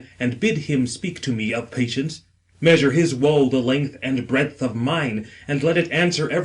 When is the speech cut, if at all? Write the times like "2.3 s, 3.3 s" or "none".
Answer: 2.1 s